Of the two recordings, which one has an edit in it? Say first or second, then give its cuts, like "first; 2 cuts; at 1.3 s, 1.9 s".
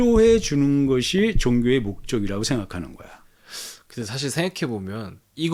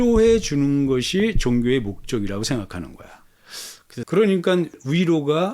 second; 1 cut; at 4.0 s